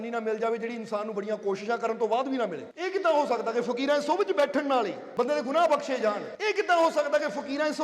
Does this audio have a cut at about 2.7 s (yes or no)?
yes